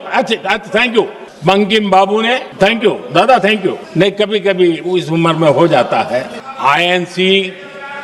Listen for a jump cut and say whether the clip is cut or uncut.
cut